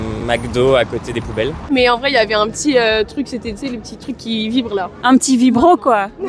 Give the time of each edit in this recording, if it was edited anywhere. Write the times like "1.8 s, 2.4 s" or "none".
1.7 s, 5.0 s